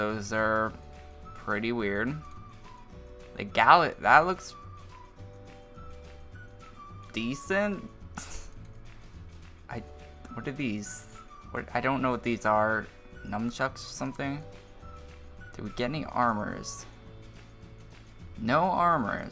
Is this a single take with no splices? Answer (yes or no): yes